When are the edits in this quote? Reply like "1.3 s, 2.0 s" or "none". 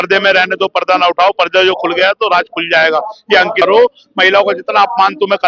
3.6 s